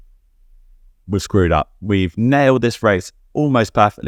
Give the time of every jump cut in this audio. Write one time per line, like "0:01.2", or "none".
none